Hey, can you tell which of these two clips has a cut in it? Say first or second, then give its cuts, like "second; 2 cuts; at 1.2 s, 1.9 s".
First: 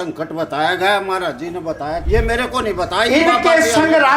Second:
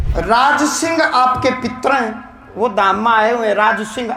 first; 1 cut; at 2.0 s